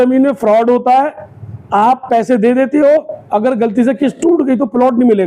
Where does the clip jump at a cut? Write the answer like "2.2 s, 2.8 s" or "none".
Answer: none

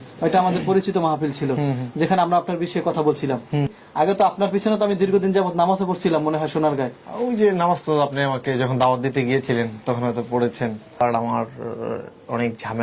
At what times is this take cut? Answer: 3.8 s, 11.0 s

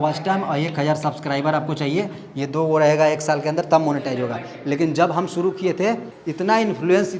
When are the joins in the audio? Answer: 6.2 s

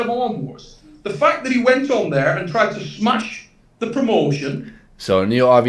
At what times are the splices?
none

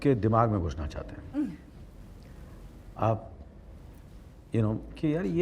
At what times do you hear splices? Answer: none

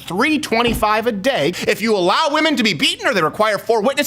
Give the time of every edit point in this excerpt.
1.6 s

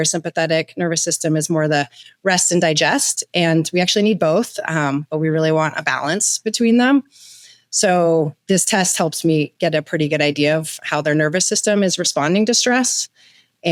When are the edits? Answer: none

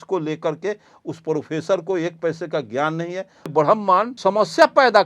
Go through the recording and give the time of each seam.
3.5 s, 4.1 s

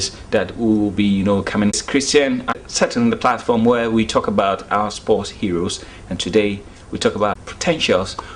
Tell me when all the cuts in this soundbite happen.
1.8 s, 2.6 s, 7.5 s

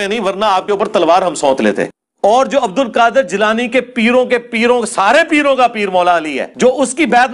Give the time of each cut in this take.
1.9 s

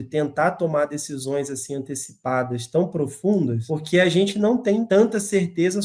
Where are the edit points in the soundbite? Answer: 3.7 s, 4.8 s

